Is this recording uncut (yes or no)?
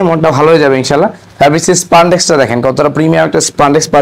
yes